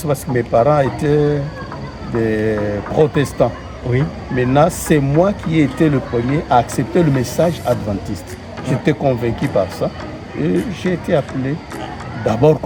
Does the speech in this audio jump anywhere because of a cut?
no; 0 cuts

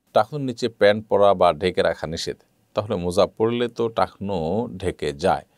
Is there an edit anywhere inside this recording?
no; 0 cuts

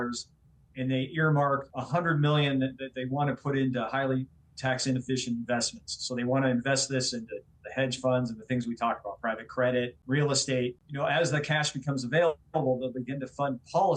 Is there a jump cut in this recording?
yes; 3 cuts; at 1.7 s, 10.0 s, 10.8 s

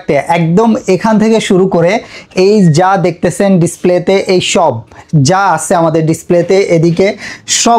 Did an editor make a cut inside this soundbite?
no; 0 cuts

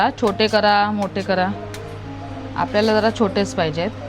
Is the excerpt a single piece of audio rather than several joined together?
yes; 0 cuts

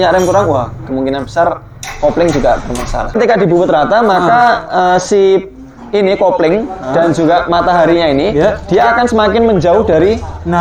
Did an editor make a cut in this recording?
yes; 1 cut; at 3.2 s

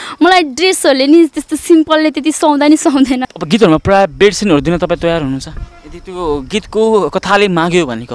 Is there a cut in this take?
yes; 1 cut; at 3.3 s

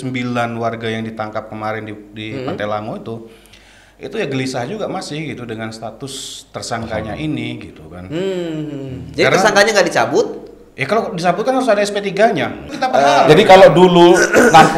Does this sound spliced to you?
yes; 1 cut; at 12.7 s

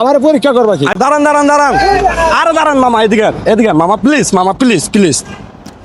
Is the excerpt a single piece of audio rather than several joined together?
no; 1 cut; at 1.0 s

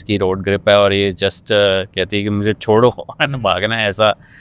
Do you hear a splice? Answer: no; 0 cuts

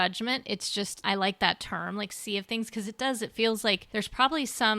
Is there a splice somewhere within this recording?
yes; 2 cuts; at 1.0 s, 3.8 s

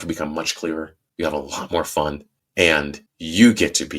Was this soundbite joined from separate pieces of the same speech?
yes; 2 cuts; at 1.0 s, 2.6 s

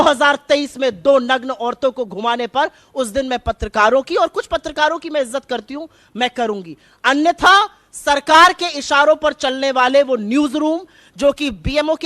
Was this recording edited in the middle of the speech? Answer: no; 0 cuts

